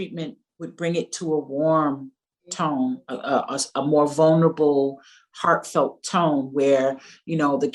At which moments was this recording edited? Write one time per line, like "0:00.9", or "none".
none

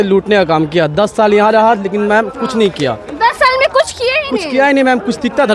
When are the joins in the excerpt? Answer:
none

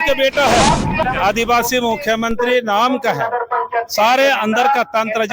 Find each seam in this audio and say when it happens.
0:01.0

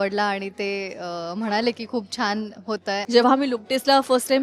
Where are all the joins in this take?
0:03.0

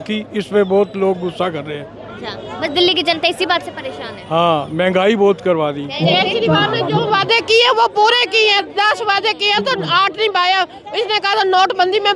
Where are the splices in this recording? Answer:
0:05.9

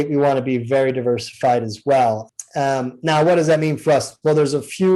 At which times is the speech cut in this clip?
0:02.3

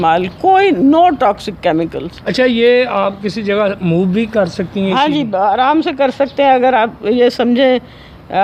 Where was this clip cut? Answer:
none

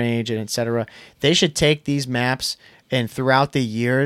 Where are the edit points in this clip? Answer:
none

